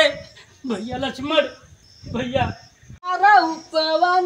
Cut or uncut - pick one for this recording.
cut